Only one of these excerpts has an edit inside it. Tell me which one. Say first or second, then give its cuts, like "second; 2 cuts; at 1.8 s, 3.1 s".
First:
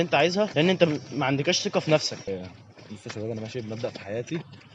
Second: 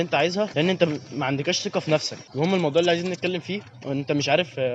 first; 1 cut; at 2.3 s